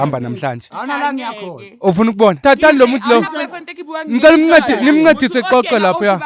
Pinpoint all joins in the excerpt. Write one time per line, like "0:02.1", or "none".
0:02.4